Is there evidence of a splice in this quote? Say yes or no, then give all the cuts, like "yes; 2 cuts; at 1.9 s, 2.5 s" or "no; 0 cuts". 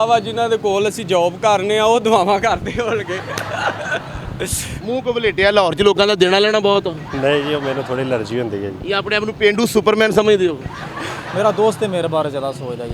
yes; 2 cuts; at 4.8 s, 11.3 s